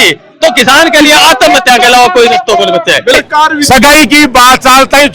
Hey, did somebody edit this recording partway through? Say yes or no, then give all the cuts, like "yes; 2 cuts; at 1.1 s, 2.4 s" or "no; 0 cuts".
yes; 1 cut; at 3.1 s